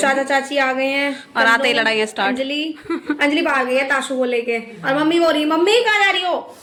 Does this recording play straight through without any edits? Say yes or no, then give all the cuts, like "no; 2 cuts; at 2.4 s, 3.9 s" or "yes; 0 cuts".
yes; 0 cuts